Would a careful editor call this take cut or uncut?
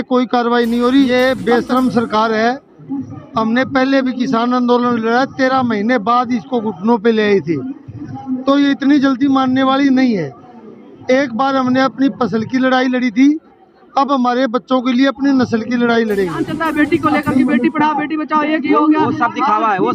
cut